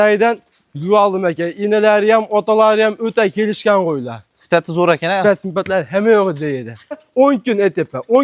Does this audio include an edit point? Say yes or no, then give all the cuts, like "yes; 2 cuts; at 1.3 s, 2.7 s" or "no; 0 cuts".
yes; 1 cut; at 7.0 s